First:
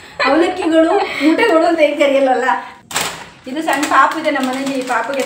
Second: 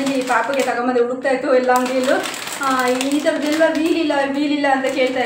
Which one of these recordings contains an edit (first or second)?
first